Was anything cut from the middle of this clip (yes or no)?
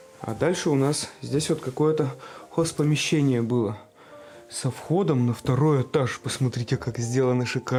no